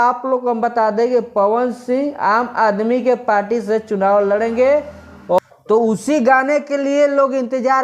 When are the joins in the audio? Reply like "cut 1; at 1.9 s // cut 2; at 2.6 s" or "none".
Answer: cut 1; at 5.4 s